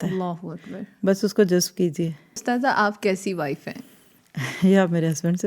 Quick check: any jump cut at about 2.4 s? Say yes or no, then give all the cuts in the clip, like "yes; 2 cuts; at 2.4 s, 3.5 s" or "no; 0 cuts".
yes; 1 cut; at 2.4 s